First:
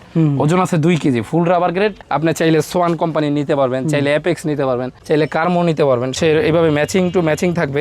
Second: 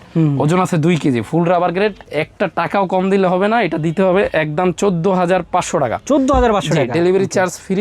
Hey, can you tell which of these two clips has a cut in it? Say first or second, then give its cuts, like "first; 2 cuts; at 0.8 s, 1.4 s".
first; 2 cuts; at 2.0 s, 6.1 s